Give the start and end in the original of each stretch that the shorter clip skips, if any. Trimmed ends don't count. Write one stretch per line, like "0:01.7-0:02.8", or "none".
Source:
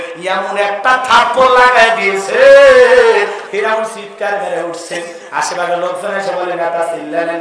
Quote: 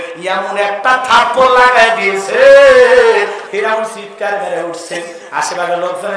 none

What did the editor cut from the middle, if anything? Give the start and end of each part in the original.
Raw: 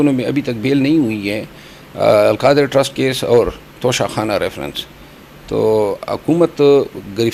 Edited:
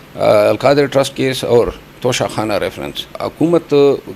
0:04.9-0:06.0

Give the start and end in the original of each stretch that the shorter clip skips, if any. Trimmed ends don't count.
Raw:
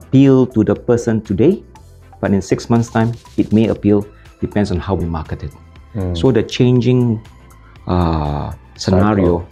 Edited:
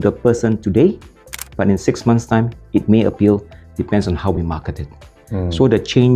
none

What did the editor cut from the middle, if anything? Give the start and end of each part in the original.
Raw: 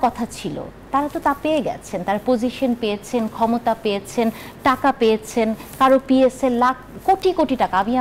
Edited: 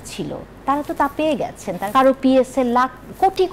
0:02.1-0:05.7

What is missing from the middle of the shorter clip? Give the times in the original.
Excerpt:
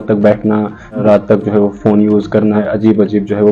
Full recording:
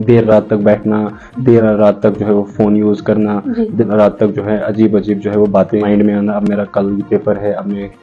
0:01.4-0:01.7
0:03.3-0:04.5

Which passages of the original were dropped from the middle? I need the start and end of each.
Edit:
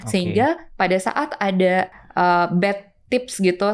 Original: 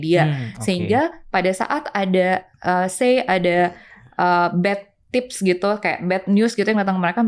0:02.5-0:04.0

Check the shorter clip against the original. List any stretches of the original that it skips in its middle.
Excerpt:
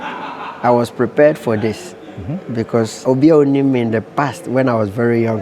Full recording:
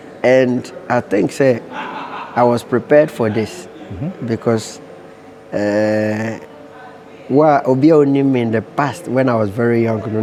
0:04.8-0:07.6

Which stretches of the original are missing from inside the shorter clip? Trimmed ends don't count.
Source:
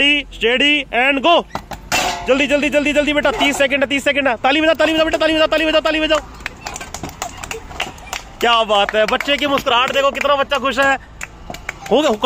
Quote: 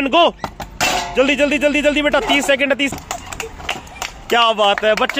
0:04.0-0:07.0

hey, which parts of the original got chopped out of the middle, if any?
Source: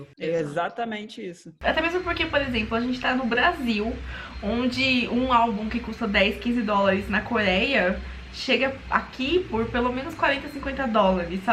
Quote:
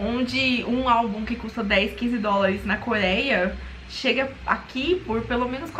none

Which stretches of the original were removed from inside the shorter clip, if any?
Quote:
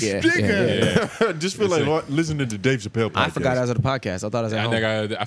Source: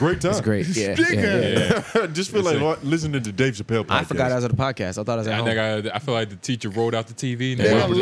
none

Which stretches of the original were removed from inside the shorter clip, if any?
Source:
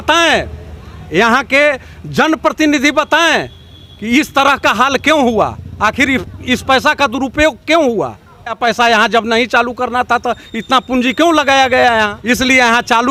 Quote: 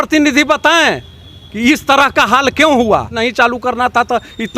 0:05.6-0:09.3

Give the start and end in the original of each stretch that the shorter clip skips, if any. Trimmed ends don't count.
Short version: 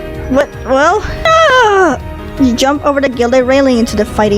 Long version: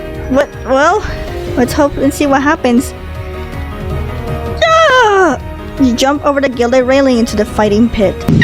0:01.3-0:04.7

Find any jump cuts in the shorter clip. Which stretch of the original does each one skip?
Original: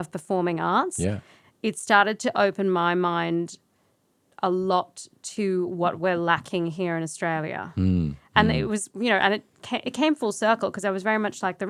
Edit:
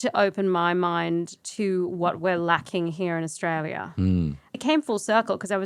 0:03.6-0:05.2
0:08.3-0:09.8

